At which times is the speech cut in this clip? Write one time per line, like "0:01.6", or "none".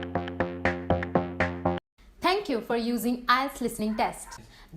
0:01.8